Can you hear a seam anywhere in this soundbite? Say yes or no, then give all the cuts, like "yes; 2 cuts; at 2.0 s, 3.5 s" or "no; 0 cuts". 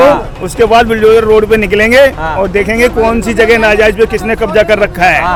no; 0 cuts